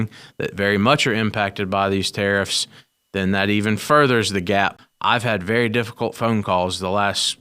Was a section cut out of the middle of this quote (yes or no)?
yes